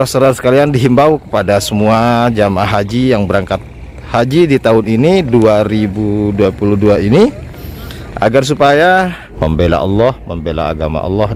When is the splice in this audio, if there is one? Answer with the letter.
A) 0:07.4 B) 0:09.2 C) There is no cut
B